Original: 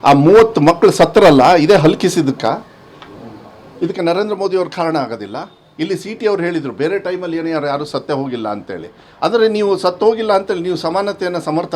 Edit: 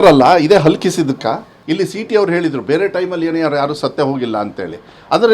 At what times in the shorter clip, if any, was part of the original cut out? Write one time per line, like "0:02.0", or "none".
0:01.5